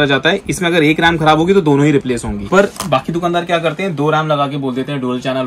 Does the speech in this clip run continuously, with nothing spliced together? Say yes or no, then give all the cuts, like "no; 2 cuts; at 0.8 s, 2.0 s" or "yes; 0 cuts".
no; 1 cut; at 2.4 s